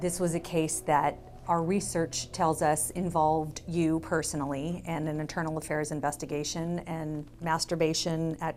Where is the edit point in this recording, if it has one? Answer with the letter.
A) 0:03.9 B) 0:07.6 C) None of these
C